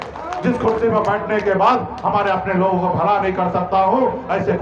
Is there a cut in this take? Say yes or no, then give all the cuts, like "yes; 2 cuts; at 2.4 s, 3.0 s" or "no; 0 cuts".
no; 0 cuts